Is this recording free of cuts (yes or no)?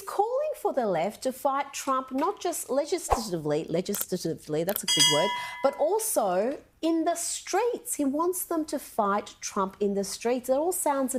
yes